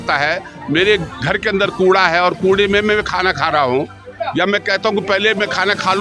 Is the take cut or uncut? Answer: uncut